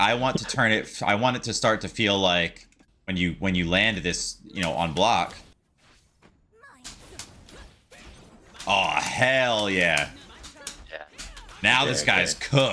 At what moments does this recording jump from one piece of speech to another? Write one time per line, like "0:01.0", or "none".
0:05.7